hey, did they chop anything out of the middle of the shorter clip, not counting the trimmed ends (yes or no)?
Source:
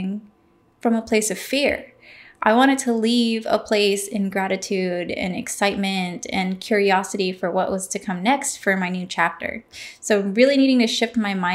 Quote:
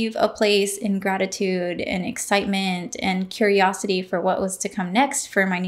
no